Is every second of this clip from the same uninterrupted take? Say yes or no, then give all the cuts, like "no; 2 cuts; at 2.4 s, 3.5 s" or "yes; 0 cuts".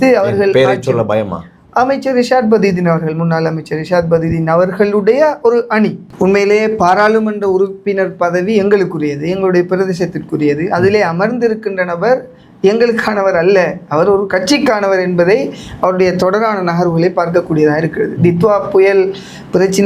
no; 1 cut; at 6.0 s